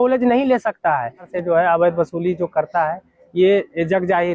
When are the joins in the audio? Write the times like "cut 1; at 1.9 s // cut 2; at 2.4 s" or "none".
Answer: cut 1; at 1.3 s